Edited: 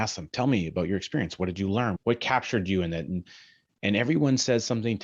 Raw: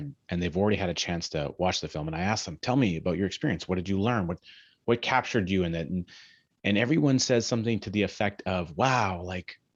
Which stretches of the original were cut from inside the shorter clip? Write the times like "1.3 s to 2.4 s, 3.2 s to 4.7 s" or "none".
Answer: 4.3 s to 4.8 s

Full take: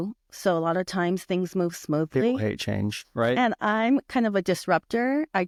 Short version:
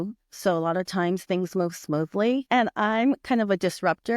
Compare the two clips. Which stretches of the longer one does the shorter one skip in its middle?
2.5 s to 3.3 s

